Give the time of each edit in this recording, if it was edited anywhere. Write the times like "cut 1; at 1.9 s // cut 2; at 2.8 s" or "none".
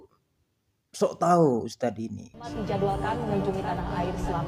cut 1; at 2.5 s

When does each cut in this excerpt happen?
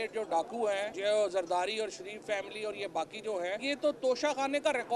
cut 1; at 0.9 s // cut 2; at 3.6 s

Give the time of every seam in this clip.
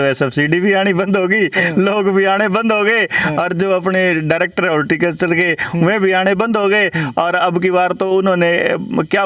none

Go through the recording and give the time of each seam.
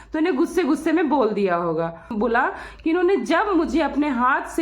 cut 1; at 2.1 s

